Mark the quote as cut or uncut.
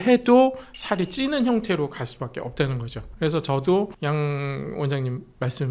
uncut